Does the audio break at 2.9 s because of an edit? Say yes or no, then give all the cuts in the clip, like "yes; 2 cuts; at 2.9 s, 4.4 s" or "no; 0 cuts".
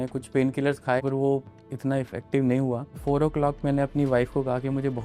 yes; 2 cuts; at 1.0 s, 2.9 s